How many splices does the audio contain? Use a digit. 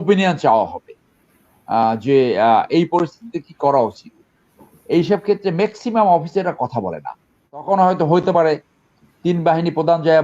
1